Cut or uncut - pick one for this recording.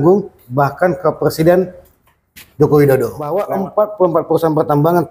cut